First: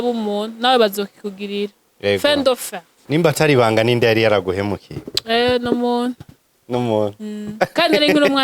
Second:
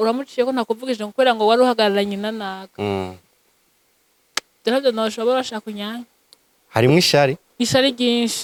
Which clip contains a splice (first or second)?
first